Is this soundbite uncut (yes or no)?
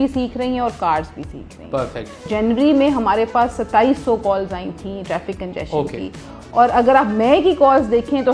no